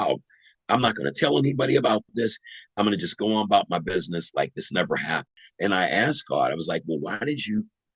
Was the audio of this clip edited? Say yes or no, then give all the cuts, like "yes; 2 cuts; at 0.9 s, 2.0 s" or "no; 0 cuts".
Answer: yes; 1 cut; at 5.3 s